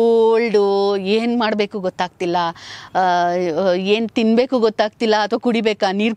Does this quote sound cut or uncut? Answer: uncut